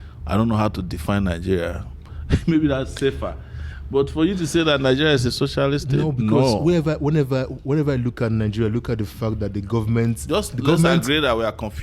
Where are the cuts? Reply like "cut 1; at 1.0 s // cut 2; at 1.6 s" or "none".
none